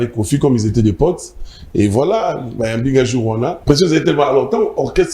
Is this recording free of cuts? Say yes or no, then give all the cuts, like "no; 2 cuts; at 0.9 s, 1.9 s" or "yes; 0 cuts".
no; 1 cut; at 3.6 s